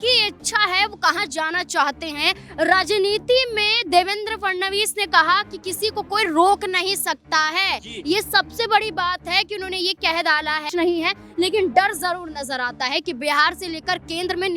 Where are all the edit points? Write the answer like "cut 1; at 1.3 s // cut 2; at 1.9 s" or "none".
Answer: cut 1; at 10.7 s